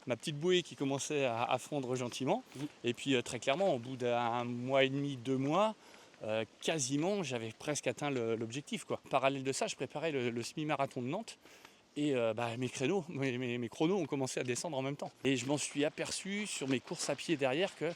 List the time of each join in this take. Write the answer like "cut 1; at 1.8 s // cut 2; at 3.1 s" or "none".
cut 1; at 9.1 s // cut 2; at 15.1 s

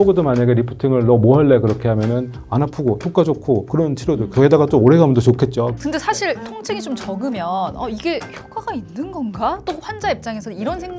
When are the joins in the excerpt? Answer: cut 1; at 5.7 s

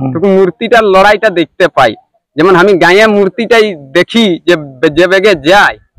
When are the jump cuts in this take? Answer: none

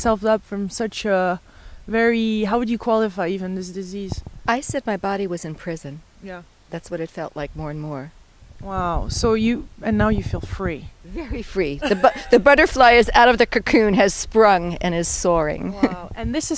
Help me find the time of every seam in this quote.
none

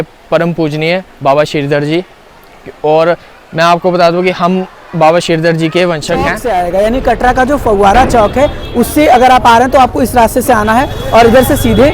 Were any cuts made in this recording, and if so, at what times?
cut 1; at 6.4 s

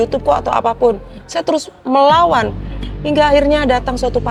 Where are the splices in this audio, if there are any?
none

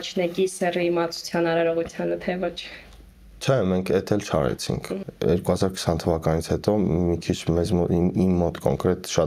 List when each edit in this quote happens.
none

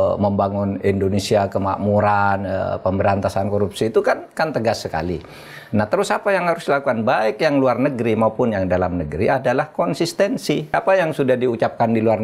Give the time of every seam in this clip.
cut 1; at 10.7 s

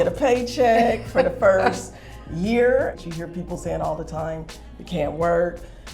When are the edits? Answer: cut 1; at 3.0 s

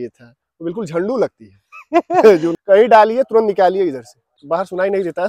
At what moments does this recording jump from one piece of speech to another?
cut 1; at 2.5 s // cut 2; at 4.3 s

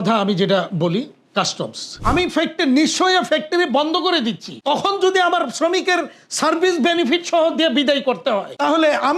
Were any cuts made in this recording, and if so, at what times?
cut 1; at 2.0 s

